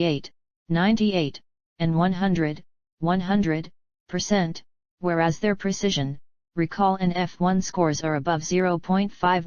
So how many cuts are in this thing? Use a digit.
1